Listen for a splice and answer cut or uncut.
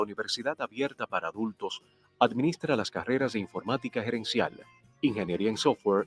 cut